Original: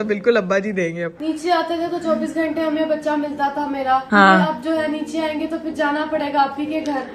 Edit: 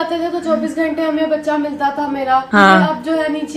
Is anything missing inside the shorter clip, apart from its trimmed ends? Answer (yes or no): no